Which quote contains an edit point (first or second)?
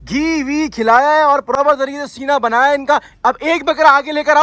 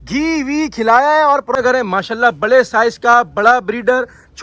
second